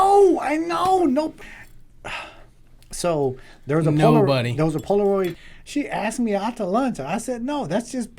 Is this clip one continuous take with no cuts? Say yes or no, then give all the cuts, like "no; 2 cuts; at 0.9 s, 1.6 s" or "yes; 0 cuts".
no; 2 cuts; at 1.4 s, 5.3 s